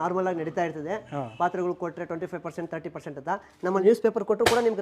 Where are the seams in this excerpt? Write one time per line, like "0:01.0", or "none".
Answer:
0:03.8